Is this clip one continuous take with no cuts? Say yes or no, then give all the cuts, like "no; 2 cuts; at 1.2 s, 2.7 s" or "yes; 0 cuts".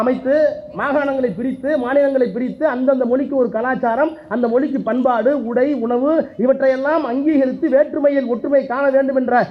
yes; 0 cuts